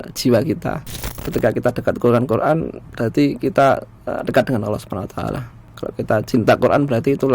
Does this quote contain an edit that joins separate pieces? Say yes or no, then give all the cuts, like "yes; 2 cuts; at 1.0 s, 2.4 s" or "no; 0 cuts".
yes; 1 cut; at 1.2 s